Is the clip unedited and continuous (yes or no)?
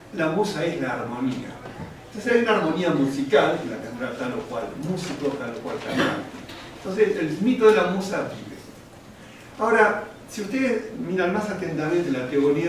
yes